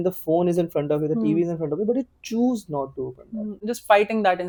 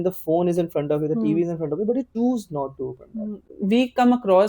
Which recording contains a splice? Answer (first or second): second